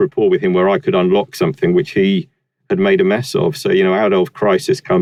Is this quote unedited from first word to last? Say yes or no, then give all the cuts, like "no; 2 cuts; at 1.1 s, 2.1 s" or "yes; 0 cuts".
yes; 0 cuts